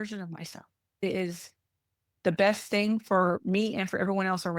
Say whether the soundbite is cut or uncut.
cut